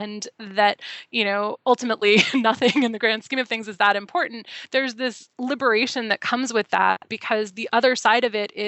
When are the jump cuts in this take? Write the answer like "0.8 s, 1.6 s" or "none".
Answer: 7.1 s